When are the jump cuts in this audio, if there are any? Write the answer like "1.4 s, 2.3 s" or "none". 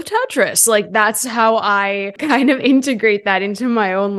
2.1 s